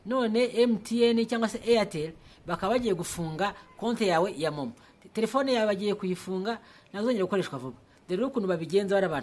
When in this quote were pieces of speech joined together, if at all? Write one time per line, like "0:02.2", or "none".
none